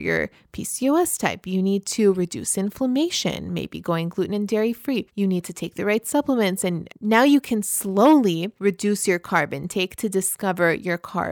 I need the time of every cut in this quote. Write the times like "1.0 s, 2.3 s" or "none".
5.1 s, 6.9 s, 8.5 s